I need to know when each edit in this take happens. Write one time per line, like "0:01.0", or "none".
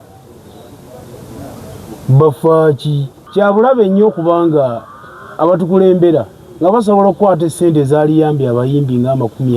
0:03.2